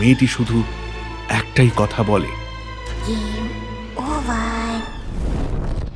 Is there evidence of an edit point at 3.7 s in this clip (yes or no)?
no